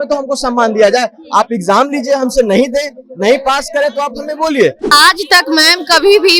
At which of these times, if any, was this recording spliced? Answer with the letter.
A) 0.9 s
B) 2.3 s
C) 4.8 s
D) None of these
C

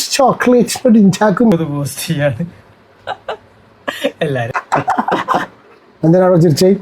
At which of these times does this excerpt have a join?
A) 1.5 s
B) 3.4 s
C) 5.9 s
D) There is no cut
A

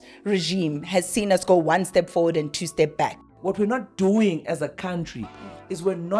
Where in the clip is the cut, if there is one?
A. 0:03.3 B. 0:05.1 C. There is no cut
A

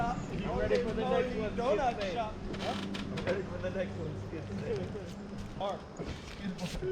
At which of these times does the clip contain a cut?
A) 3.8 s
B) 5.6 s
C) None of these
B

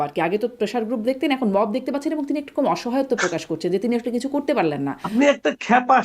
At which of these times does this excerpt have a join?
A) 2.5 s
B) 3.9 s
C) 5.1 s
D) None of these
C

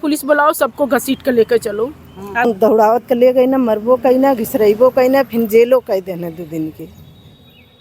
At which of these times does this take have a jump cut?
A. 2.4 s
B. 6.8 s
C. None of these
A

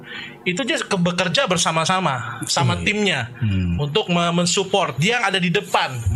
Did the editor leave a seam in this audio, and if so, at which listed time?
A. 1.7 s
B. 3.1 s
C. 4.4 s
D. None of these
D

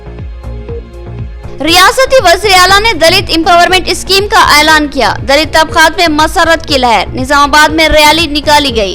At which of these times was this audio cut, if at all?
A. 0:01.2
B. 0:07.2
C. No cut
A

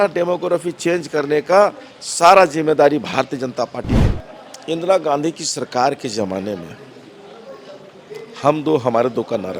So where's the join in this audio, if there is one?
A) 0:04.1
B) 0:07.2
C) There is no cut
A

